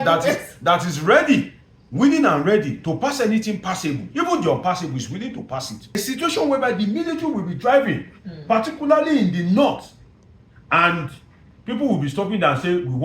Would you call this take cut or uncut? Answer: cut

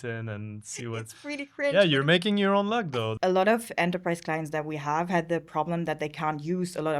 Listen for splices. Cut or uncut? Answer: cut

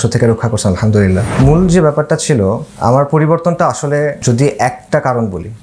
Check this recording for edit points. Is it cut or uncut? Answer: cut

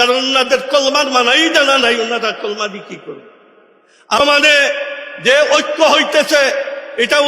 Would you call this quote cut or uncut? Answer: cut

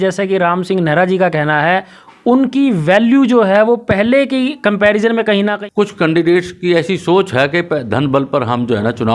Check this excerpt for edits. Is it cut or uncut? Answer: cut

